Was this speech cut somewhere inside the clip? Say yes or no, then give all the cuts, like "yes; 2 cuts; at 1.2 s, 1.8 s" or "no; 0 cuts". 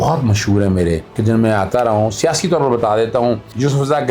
yes; 1 cut; at 1.1 s